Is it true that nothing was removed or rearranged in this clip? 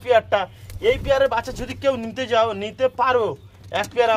yes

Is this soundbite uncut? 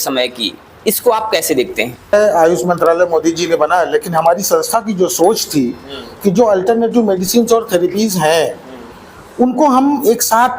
no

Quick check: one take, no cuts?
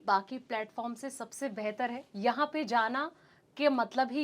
no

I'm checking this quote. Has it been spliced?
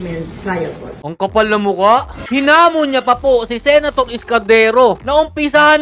yes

